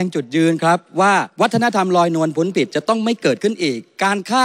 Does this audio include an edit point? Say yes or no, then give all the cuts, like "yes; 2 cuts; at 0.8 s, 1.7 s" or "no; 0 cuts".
yes; 1 cut; at 1.3 s